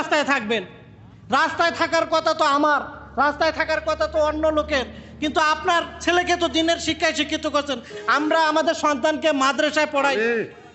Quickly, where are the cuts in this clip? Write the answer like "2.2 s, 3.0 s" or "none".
none

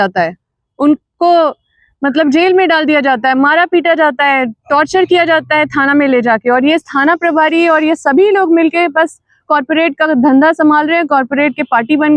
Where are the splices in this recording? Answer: none

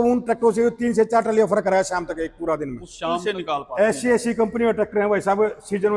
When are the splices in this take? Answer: 3.2 s

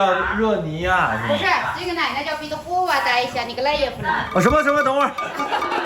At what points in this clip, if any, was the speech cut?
none

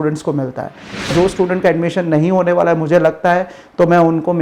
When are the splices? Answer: 1.1 s

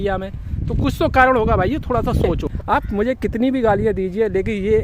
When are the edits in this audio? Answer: 2.5 s

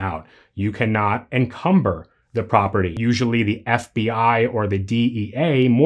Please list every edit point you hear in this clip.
2.9 s

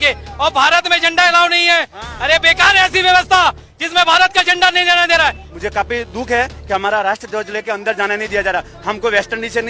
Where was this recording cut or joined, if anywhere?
5.5 s

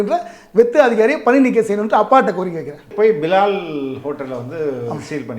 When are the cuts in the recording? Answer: 2.9 s

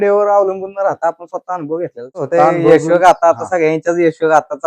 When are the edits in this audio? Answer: 2.3 s

